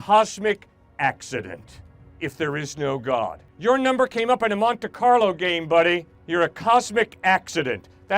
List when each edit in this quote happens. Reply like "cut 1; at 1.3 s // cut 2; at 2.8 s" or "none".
cut 1; at 3.4 s // cut 2; at 6.1 s